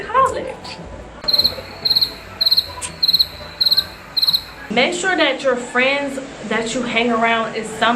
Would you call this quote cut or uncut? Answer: cut